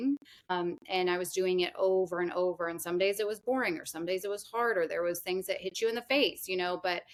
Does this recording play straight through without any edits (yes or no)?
yes